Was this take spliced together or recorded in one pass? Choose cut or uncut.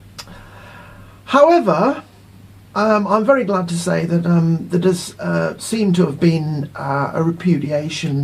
cut